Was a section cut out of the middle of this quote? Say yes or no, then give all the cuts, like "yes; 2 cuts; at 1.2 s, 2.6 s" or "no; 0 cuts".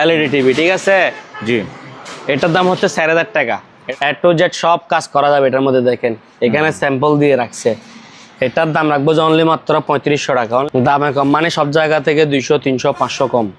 yes; 2 cuts; at 3.7 s, 10.6 s